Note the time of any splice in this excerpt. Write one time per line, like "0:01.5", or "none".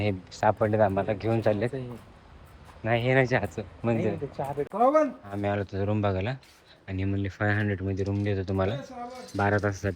0:04.6